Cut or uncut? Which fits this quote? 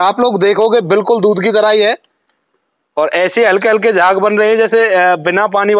uncut